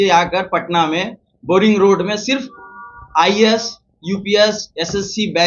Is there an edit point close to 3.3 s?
no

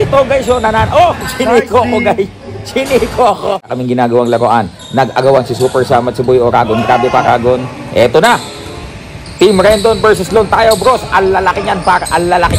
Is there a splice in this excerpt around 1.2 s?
no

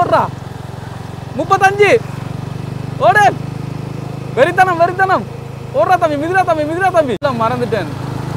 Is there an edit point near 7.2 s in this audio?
yes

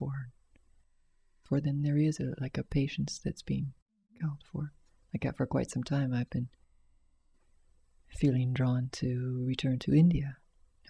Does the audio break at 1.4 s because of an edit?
yes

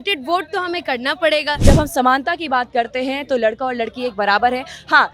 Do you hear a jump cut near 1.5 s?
yes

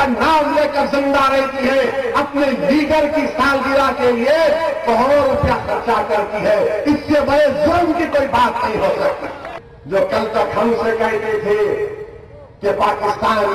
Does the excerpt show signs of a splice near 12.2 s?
yes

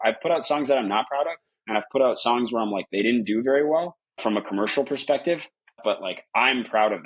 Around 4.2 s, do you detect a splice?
yes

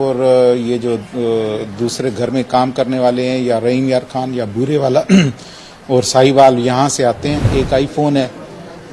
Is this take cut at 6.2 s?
no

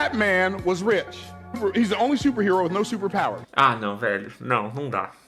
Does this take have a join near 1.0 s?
no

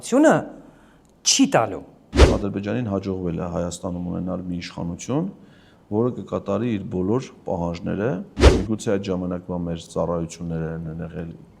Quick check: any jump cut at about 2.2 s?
yes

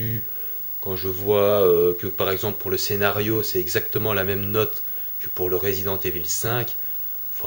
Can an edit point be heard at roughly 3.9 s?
yes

